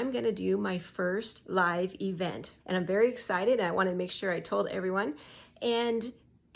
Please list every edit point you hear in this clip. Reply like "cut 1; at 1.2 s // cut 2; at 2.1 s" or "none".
cut 1; at 2.5 s